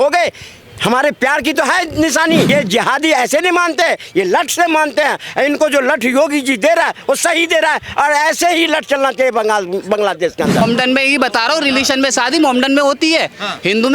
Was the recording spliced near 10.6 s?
yes; 2 cuts; at 2.5 s, 10.6 s

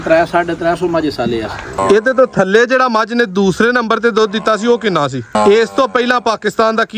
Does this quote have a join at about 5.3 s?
yes; 2 cuts; at 1.6 s, 5.3 s

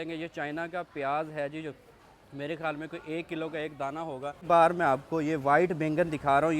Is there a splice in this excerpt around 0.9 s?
no; 1 cut; at 4.4 s

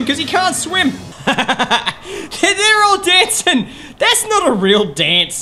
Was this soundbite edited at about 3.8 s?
no; 1 cut; at 1.1 s

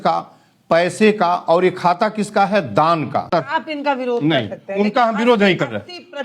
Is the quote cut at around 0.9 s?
no; 1 cut; at 3.3 s

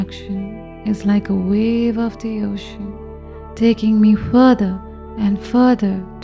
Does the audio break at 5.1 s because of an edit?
no; 0 cuts

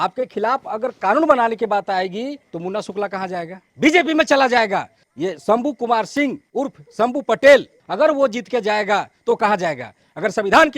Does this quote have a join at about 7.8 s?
yes; 5 cuts; at 2.5 s, 3.6 s, 5.0 s, 6.4 s, 7.8 s

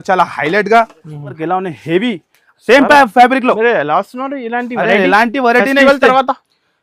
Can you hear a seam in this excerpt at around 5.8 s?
no; 1 cut; at 1.3 s

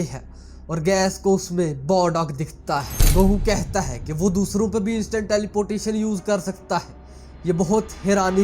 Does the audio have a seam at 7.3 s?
no; 1 cut; at 3.0 s

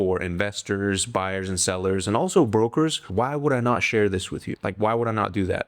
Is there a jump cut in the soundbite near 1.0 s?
no; 2 cuts; at 3.0 s, 4.4 s

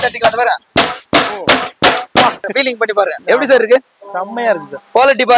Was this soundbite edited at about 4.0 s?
no; 1 cut; at 2.5 s

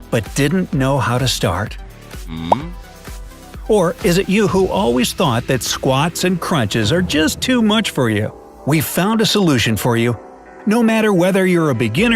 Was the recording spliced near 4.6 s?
no; 1 cut; at 2.6 s

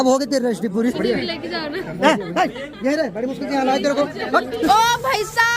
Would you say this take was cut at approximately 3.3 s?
no; 2 cuts; at 0.9 s, 4.7 s

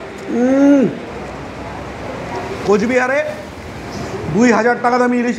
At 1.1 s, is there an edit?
yes; 1 cut; at 1.1 s

